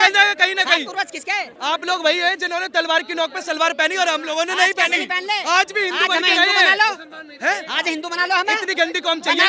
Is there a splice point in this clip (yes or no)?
yes